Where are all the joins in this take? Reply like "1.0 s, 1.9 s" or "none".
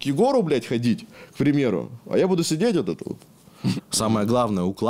3.7 s